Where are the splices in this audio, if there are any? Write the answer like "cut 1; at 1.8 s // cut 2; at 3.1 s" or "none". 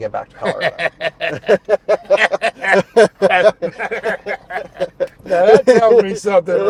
none

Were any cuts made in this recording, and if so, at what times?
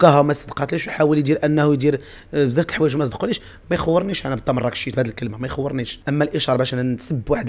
cut 1; at 5.9 s

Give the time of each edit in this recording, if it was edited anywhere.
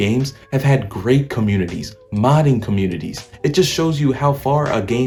none

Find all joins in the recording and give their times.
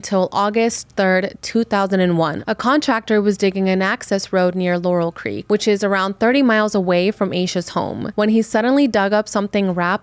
cut 1; at 2.4 s // cut 2; at 5.3 s // cut 3; at 8.0 s

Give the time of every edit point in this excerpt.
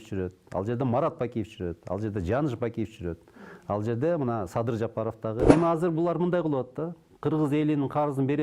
cut 1; at 5.5 s

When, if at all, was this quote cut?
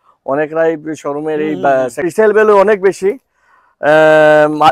cut 1; at 2.1 s

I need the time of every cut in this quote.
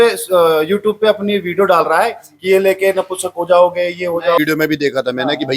cut 1; at 4.4 s

